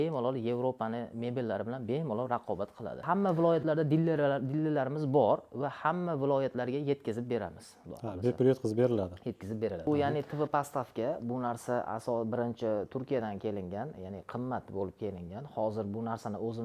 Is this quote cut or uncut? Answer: cut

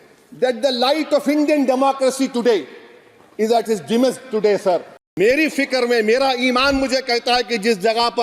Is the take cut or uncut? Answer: cut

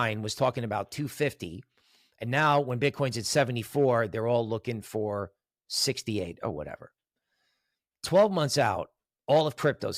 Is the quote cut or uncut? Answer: uncut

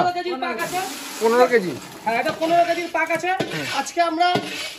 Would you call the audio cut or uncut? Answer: uncut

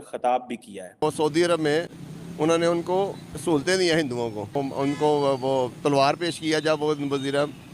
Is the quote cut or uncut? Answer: cut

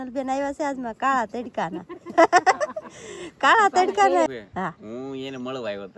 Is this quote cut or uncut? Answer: cut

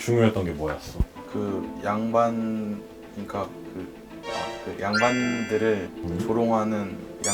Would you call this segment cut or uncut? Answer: uncut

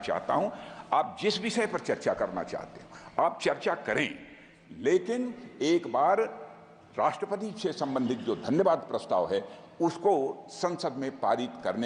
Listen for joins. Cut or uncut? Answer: uncut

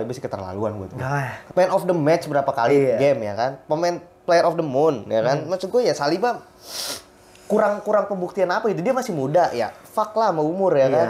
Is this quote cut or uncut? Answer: cut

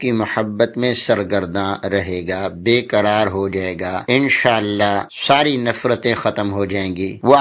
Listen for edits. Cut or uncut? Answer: uncut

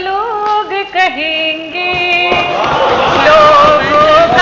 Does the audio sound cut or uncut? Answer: uncut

